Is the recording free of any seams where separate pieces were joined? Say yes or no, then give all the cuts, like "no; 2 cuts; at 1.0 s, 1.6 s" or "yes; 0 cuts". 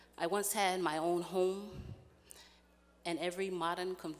yes; 0 cuts